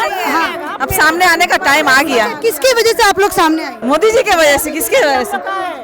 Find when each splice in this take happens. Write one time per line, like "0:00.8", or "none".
0:03.7